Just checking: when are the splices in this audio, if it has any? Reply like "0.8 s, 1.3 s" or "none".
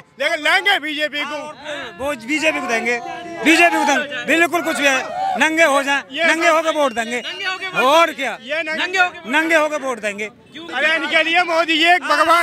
10.6 s